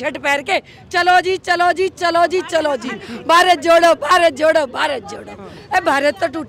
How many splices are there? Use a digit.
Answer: 0